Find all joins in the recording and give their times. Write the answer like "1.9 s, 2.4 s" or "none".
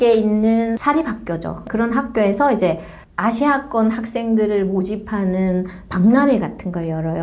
none